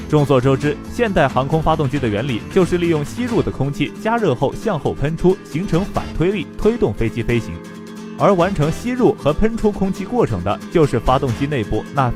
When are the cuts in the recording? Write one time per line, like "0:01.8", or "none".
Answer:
0:01.5